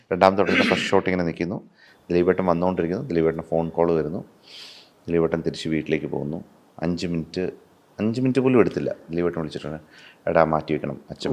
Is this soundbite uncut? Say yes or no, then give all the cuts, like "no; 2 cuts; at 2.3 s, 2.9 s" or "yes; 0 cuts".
yes; 0 cuts